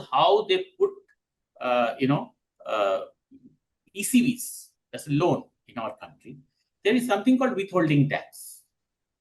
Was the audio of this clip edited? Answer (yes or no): no